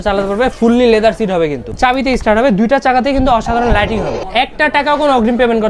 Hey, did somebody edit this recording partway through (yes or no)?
yes